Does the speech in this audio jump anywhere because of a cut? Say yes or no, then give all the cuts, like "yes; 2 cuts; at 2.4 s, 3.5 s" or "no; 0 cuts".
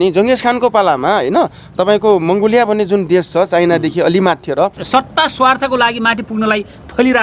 yes; 1 cut; at 4.8 s